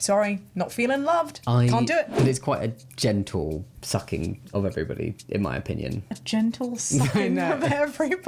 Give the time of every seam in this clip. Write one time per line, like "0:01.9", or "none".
0:02.1